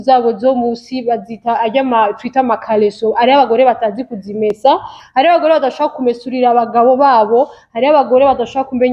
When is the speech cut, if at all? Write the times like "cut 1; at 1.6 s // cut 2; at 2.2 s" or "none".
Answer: none

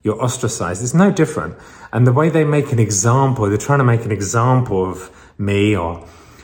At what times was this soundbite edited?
none

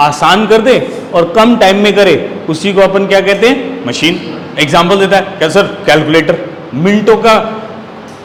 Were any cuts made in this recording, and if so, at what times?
none

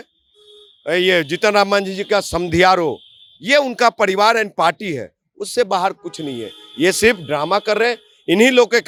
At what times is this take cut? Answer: none

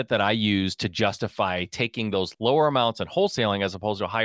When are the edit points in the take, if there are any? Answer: cut 1; at 2.3 s

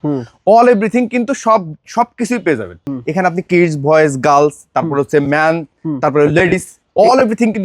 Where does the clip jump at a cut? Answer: cut 1; at 2.8 s

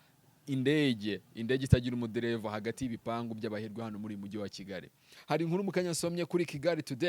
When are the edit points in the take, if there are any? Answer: cut 1; at 5.1 s

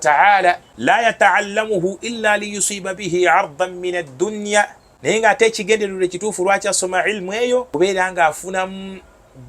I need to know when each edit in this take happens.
cut 1; at 1.0 s // cut 2; at 5.1 s // cut 3; at 7.7 s

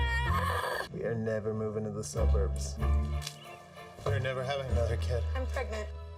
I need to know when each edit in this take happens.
none

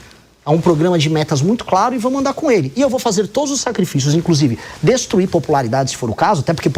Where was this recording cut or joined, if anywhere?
none

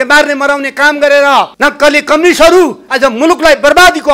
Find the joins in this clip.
cut 1; at 1.5 s

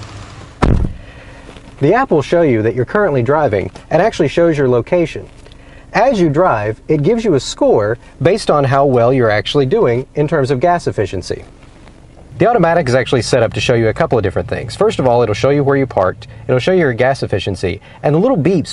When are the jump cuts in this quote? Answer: cut 1; at 8.0 s

